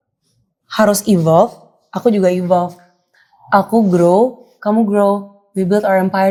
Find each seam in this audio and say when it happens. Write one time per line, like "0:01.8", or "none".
none